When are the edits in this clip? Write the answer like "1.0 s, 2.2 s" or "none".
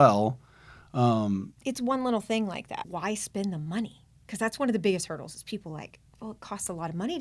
2.8 s